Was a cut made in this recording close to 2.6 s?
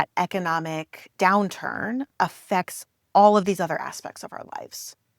no; 1 cut; at 1.0 s

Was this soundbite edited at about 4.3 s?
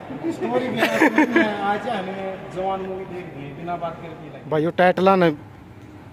yes; 1 cut; at 4.3 s

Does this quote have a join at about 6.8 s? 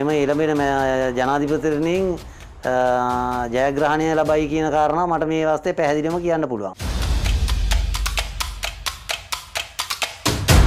yes; 1 cut; at 6.8 s

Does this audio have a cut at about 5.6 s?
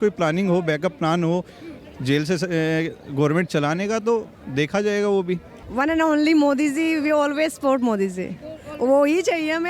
yes; 1 cut; at 5.6 s

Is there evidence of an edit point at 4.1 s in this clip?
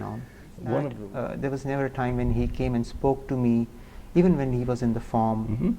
no; 1 cut; at 1.0 s

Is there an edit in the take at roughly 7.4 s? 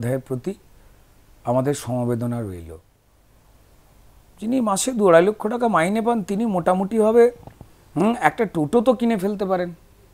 no; 1 cut; at 3.0 s

